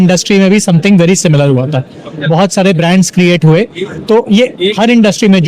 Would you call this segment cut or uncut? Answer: uncut